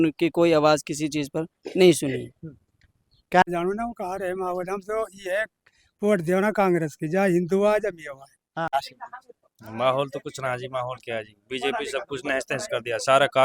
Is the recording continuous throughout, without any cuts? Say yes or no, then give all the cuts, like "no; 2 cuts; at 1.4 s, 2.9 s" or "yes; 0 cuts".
no; 2 cuts; at 3.4 s, 8.9 s